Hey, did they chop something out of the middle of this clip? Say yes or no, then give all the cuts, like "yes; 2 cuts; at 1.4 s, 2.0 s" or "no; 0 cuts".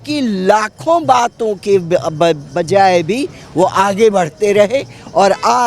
no; 0 cuts